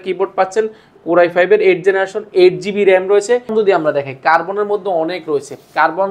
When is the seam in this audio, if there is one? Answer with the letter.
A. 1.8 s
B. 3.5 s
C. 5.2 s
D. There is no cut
B